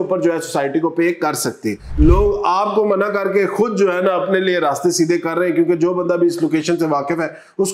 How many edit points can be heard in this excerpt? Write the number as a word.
one